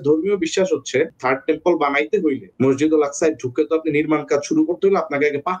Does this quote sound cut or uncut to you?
cut